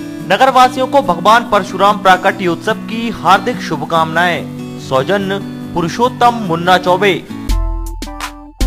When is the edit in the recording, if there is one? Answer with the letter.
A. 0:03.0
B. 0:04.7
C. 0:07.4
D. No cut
C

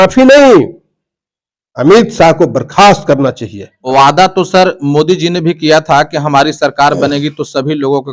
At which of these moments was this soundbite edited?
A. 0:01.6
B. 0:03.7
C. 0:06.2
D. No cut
B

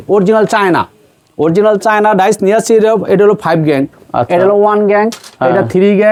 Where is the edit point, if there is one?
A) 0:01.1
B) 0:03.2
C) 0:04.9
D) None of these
D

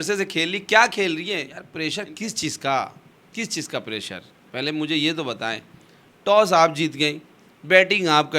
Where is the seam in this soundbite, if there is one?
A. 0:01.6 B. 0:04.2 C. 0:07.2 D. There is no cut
A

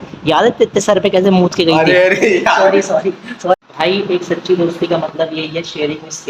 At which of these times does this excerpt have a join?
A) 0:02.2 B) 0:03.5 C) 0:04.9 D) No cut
B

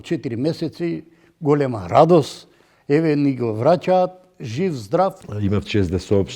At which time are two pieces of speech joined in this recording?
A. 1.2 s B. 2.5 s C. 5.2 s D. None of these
C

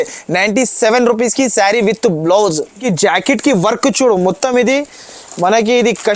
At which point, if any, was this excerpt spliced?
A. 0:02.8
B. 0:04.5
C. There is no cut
A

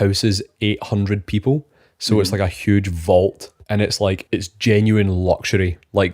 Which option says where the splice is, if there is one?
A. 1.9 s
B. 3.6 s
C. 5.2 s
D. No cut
B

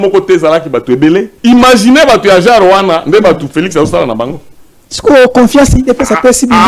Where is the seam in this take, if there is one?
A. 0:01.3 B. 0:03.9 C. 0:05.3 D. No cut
A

